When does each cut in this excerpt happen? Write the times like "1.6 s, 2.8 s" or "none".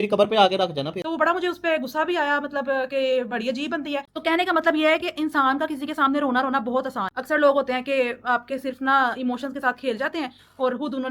1.0 s, 4.0 s, 7.2 s